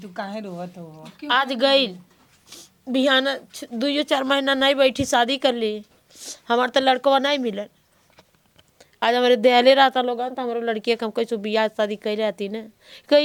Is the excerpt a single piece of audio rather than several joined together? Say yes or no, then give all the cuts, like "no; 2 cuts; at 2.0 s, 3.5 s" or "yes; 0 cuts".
yes; 0 cuts